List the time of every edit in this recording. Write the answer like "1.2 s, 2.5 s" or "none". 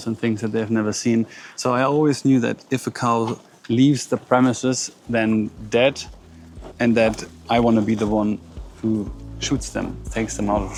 none